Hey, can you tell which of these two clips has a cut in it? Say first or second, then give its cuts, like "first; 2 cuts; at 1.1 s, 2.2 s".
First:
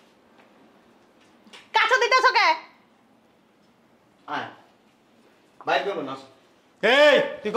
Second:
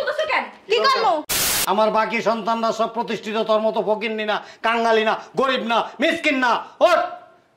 second; 1 cut; at 1.6 s